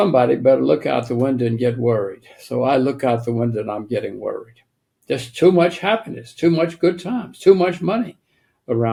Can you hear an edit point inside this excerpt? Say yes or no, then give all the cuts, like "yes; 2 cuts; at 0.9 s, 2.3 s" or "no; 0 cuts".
no; 0 cuts